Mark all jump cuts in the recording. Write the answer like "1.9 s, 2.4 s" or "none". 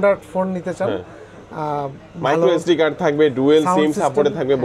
none